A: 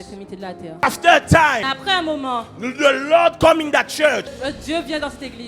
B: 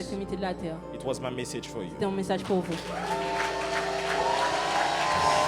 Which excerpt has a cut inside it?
A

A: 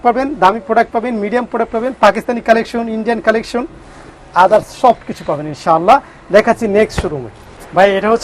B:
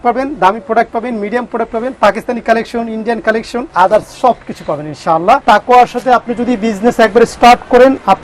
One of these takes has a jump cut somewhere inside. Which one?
B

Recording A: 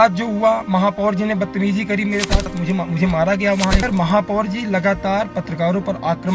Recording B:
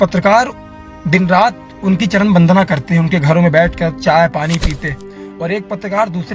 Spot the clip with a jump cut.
A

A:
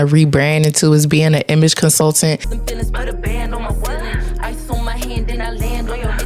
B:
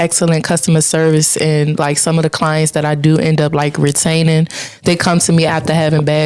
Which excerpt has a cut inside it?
A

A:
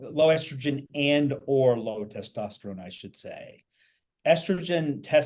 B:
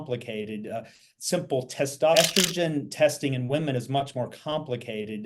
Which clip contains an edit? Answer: B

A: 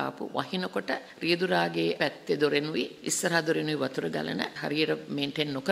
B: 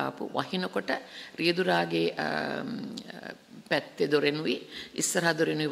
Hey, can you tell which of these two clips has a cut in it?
A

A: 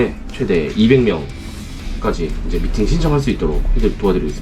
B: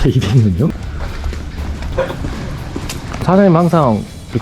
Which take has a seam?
B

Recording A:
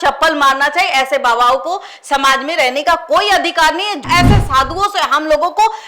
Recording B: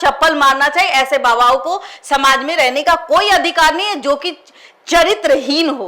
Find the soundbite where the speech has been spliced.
A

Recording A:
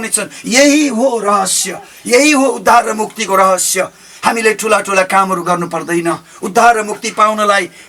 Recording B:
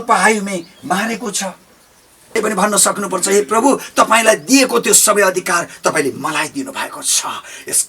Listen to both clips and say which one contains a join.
B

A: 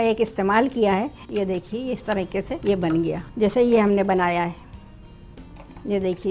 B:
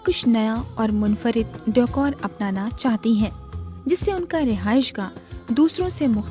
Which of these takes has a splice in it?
A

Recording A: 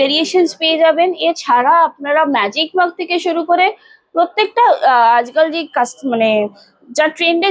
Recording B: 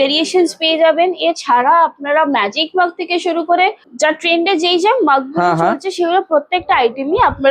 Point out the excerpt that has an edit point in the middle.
B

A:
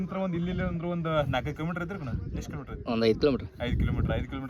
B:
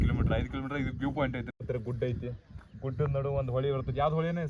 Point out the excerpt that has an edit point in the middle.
B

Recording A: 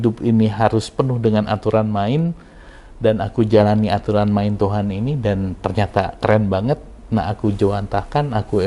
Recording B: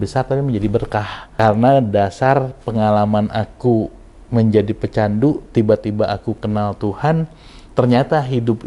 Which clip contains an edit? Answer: B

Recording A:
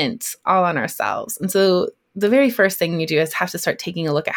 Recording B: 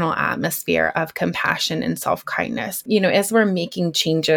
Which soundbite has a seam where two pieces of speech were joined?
B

